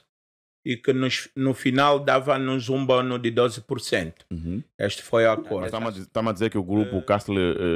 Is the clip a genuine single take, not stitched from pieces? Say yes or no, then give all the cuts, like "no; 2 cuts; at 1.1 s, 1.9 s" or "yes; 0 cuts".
no; 1 cut; at 5.7 s